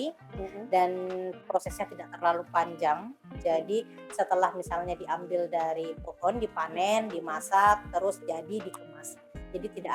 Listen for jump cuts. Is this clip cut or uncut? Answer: uncut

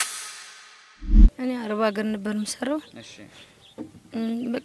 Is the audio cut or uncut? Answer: cut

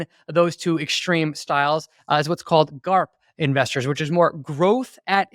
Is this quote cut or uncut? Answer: uncut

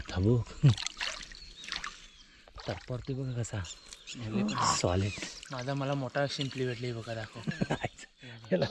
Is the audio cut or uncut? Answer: uncut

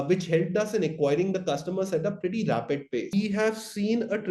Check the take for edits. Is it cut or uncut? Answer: cut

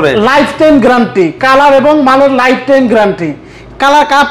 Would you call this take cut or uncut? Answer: uncut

